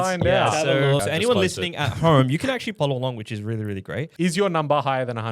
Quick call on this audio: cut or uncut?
cut